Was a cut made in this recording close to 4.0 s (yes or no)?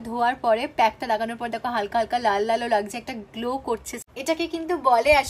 yes